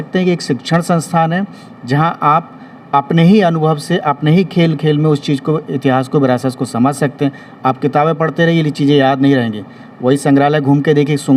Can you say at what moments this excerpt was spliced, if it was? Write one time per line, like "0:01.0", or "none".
none